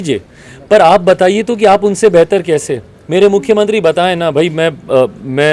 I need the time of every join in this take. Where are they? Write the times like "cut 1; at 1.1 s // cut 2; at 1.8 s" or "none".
none

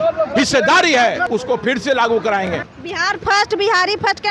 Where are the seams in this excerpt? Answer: cut 1; at 1.2 s // cut 2; at 2.7 s

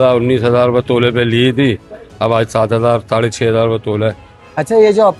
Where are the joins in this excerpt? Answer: none

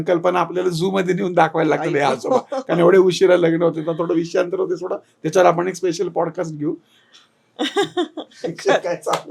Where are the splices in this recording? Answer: none

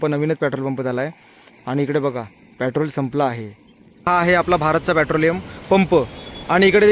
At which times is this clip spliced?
cut 1; at 4.0 s

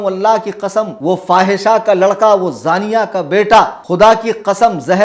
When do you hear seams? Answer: cut 1; at 0.9 s // cut 2; at 3.8 s

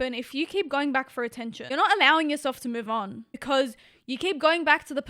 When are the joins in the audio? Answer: cut 1; at 1.6 s // cut 2; at 3.3 s

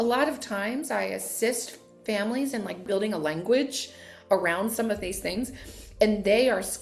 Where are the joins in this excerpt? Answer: cut 1; at 2.8 s

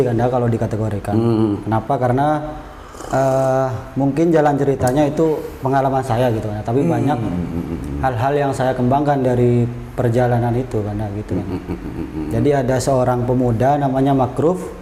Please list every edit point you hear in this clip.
none

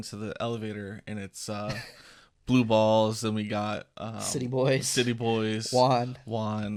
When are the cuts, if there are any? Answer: none

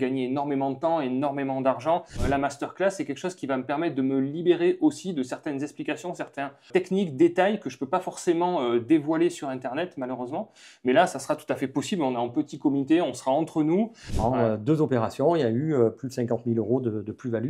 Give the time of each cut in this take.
cut 1; at 2.2 s // cut 2; at 6.7 s // cut 3; at 14.0 s

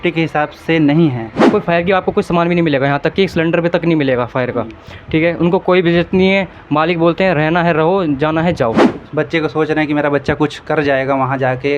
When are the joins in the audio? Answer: cut 1; at 1.5 s // cut 2; at 8.9 s

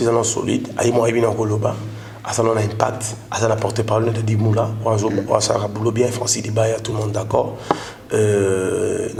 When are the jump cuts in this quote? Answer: none

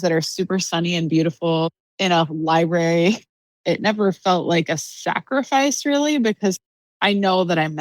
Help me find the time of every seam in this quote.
cut 1; at 1.7 s // cut 2; at 3.3 s

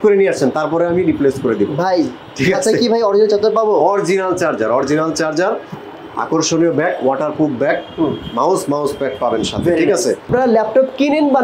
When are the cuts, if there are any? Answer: cut 1; at 10.3 s

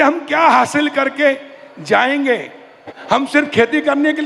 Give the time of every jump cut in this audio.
cut 1; at 2.9 s

